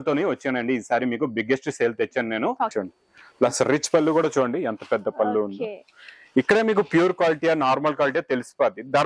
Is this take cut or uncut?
cut